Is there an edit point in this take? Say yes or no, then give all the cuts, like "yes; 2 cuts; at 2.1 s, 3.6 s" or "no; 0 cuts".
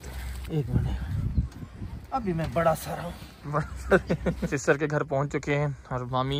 yes; 1 cut; at 4.5 s